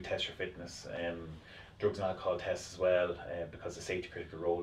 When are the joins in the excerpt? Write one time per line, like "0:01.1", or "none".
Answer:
none